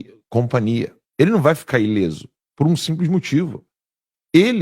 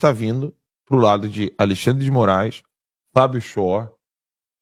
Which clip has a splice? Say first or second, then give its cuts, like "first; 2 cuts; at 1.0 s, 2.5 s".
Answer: first; 1 cut; at 1.0 s